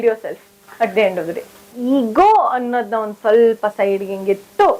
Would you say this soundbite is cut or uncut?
cut